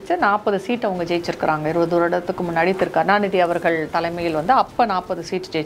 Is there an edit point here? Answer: no; 0 cuts

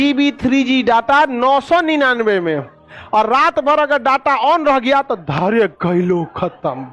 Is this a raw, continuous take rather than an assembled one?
yes; 0 cuts

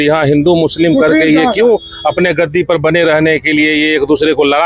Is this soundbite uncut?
yes; 0 cuts

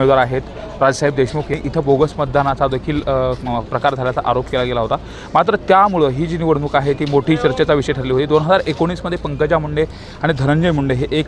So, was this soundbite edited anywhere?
yes; 1 cut; at 1.5 s

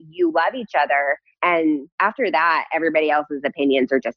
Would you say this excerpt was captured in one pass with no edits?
no; 2 cuts; at 1.3 s, 1.9 s

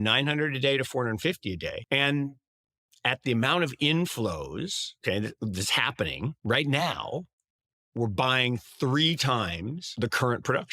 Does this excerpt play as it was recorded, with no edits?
no; 4 cuts; at 1.8 s, 4.9 s, 6.4 s, 9.8 s

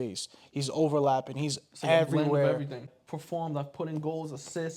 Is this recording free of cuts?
no; 1 cut; at 2.8 s

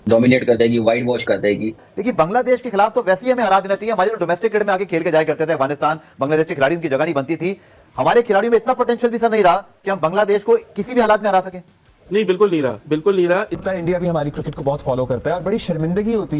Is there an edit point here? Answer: yes; 2 cuts; at 1.8 s, 13.5 s

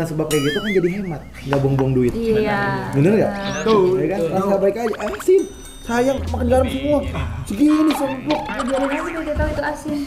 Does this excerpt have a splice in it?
no; 0 cuts

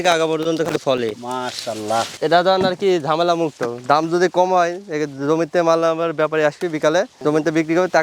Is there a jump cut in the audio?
yes; 1 cut; at 2.1 s

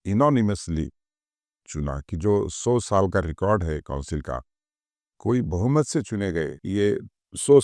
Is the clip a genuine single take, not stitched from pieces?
no; 1 cut; at 6.6 s

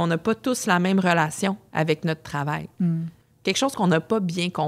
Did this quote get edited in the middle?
yes; 1 cut; at 3.2 s

